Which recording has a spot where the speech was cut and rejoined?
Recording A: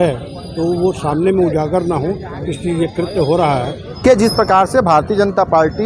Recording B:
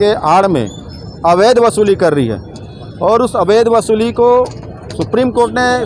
A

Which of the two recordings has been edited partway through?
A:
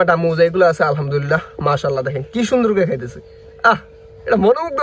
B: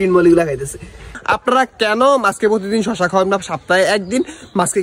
B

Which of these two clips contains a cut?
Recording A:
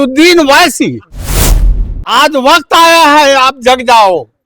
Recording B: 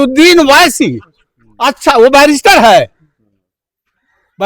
A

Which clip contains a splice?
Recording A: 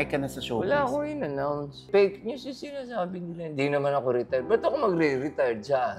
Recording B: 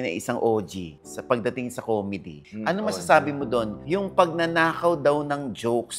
A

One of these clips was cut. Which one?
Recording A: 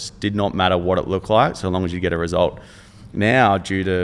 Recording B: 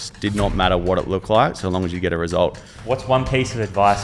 B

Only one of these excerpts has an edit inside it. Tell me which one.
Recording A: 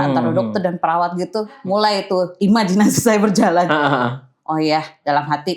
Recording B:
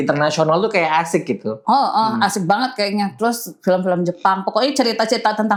A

